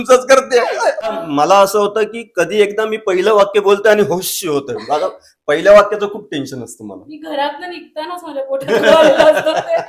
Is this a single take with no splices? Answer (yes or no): no